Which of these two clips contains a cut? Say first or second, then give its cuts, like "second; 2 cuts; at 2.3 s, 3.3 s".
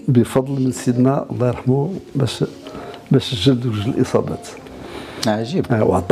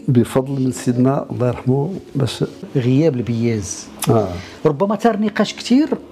second; 1 cut; at 2.7 s